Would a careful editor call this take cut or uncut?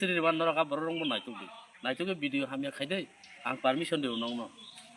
uncut